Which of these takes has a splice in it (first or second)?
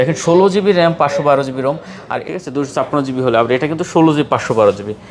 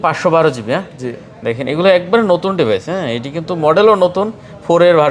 first